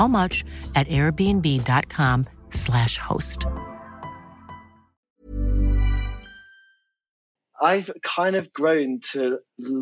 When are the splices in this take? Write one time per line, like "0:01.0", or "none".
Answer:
0:07.2